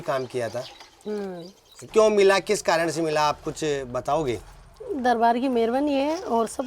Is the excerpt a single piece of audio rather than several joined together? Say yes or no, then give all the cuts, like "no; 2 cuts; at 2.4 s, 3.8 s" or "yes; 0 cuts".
no; 1 cut; at 1.9 s